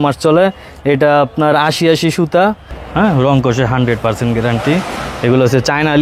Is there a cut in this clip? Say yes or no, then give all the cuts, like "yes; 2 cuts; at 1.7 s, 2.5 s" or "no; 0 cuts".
yes; 1 cut; at 2.7 s